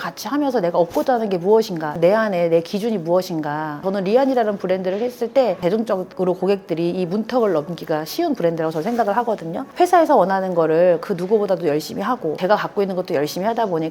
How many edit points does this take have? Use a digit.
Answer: 4